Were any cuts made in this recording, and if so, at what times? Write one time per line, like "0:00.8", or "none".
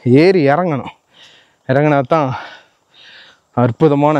none